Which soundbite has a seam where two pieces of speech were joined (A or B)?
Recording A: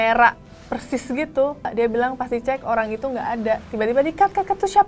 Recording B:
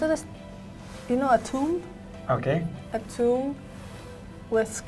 A